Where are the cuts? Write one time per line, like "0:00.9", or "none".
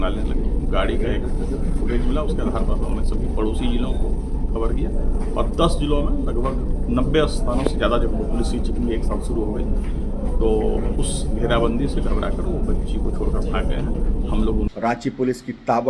0:14.7